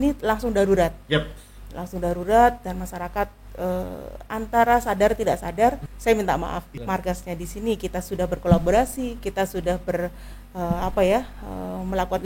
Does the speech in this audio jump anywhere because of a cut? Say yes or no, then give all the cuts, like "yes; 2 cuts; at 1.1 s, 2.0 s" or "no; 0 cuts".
yes; 2 cuts; at 5.9 s, 6.7 s